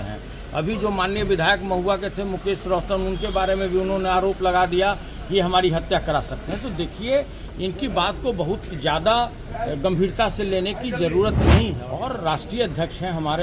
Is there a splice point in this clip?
yes; 1 cut; at 11.8 s

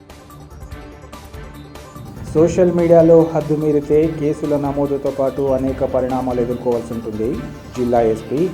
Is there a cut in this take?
yes; 1 cut; at 1.1 s

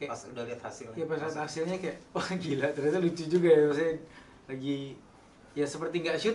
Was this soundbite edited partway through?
no; 0 cuts

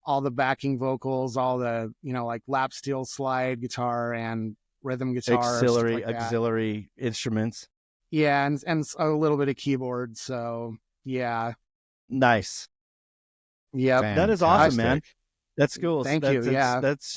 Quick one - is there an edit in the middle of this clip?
no; 0 cuts

